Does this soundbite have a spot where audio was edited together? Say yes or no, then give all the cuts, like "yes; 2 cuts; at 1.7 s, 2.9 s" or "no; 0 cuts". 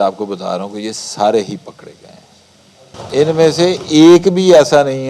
yes; 1 cut; at 2.9 s